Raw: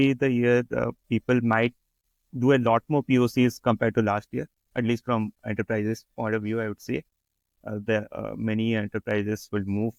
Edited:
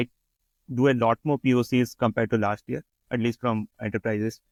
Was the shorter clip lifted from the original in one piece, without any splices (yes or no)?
yes